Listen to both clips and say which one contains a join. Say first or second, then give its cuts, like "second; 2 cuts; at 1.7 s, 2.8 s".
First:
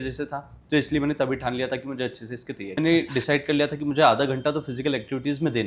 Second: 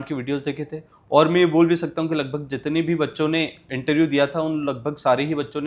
first; 1 cut; at 2.8 s